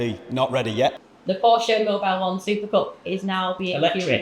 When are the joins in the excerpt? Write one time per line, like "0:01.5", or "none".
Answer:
0:01.1

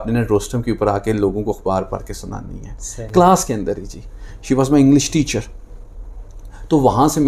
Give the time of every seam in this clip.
none

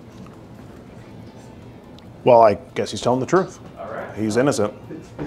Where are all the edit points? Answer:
0:01.1

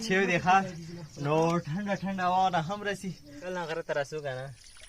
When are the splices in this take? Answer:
0:03.4

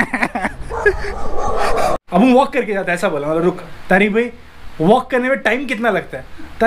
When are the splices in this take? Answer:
0:02.0

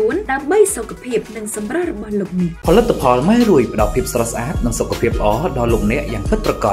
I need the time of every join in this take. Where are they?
none

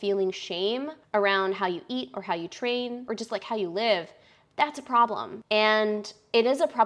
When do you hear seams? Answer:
0:01.0
0:03.0
0:05.4

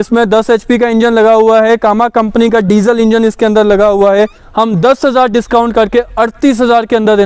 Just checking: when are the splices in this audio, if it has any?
0:04.4

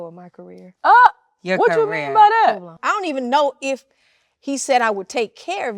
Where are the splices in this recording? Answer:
0:02.8

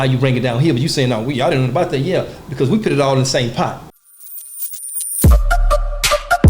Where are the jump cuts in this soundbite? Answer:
0:04.0

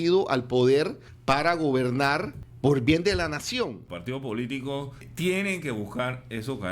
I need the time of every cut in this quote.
0:01.1
0:02.4
0:03.8
0:05.1

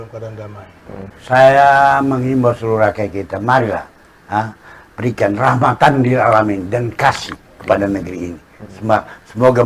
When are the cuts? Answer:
0:01.1

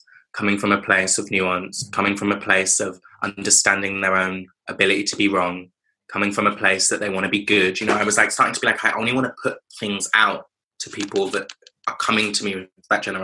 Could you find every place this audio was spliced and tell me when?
none

